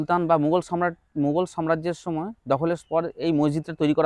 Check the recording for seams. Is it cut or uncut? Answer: uncut